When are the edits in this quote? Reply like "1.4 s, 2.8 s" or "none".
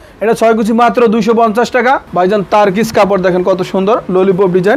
2.1 s